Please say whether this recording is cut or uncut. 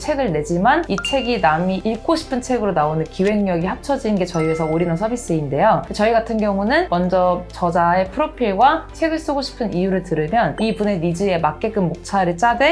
uncut